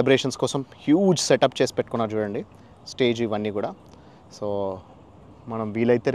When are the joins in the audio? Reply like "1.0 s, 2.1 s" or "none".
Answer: none